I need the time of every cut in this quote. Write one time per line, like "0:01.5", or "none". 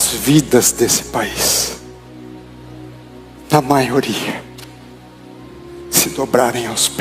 none